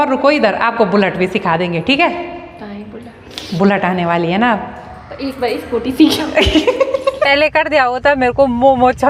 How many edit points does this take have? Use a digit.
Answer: 1